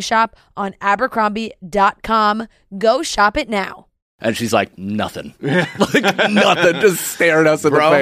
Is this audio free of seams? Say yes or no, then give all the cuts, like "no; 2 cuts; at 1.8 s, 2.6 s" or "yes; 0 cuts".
no; 1 cut; at 4.1 s